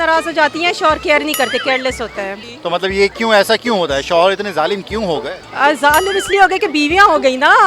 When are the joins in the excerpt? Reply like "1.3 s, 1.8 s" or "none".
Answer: 2.5 s